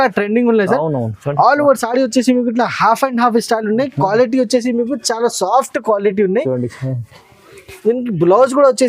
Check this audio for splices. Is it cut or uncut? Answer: uncut